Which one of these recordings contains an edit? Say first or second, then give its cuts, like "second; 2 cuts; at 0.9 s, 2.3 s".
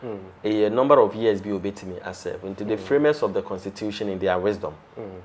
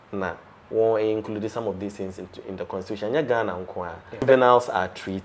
second; 1 cut; at 4.2 s